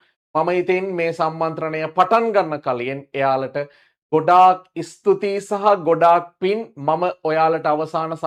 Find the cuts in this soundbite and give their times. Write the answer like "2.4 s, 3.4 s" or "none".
none